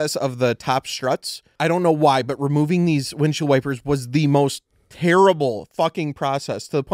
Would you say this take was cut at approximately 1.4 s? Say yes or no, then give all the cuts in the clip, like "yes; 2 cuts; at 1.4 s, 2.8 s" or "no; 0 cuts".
yes; 1 cut; at 1.4 s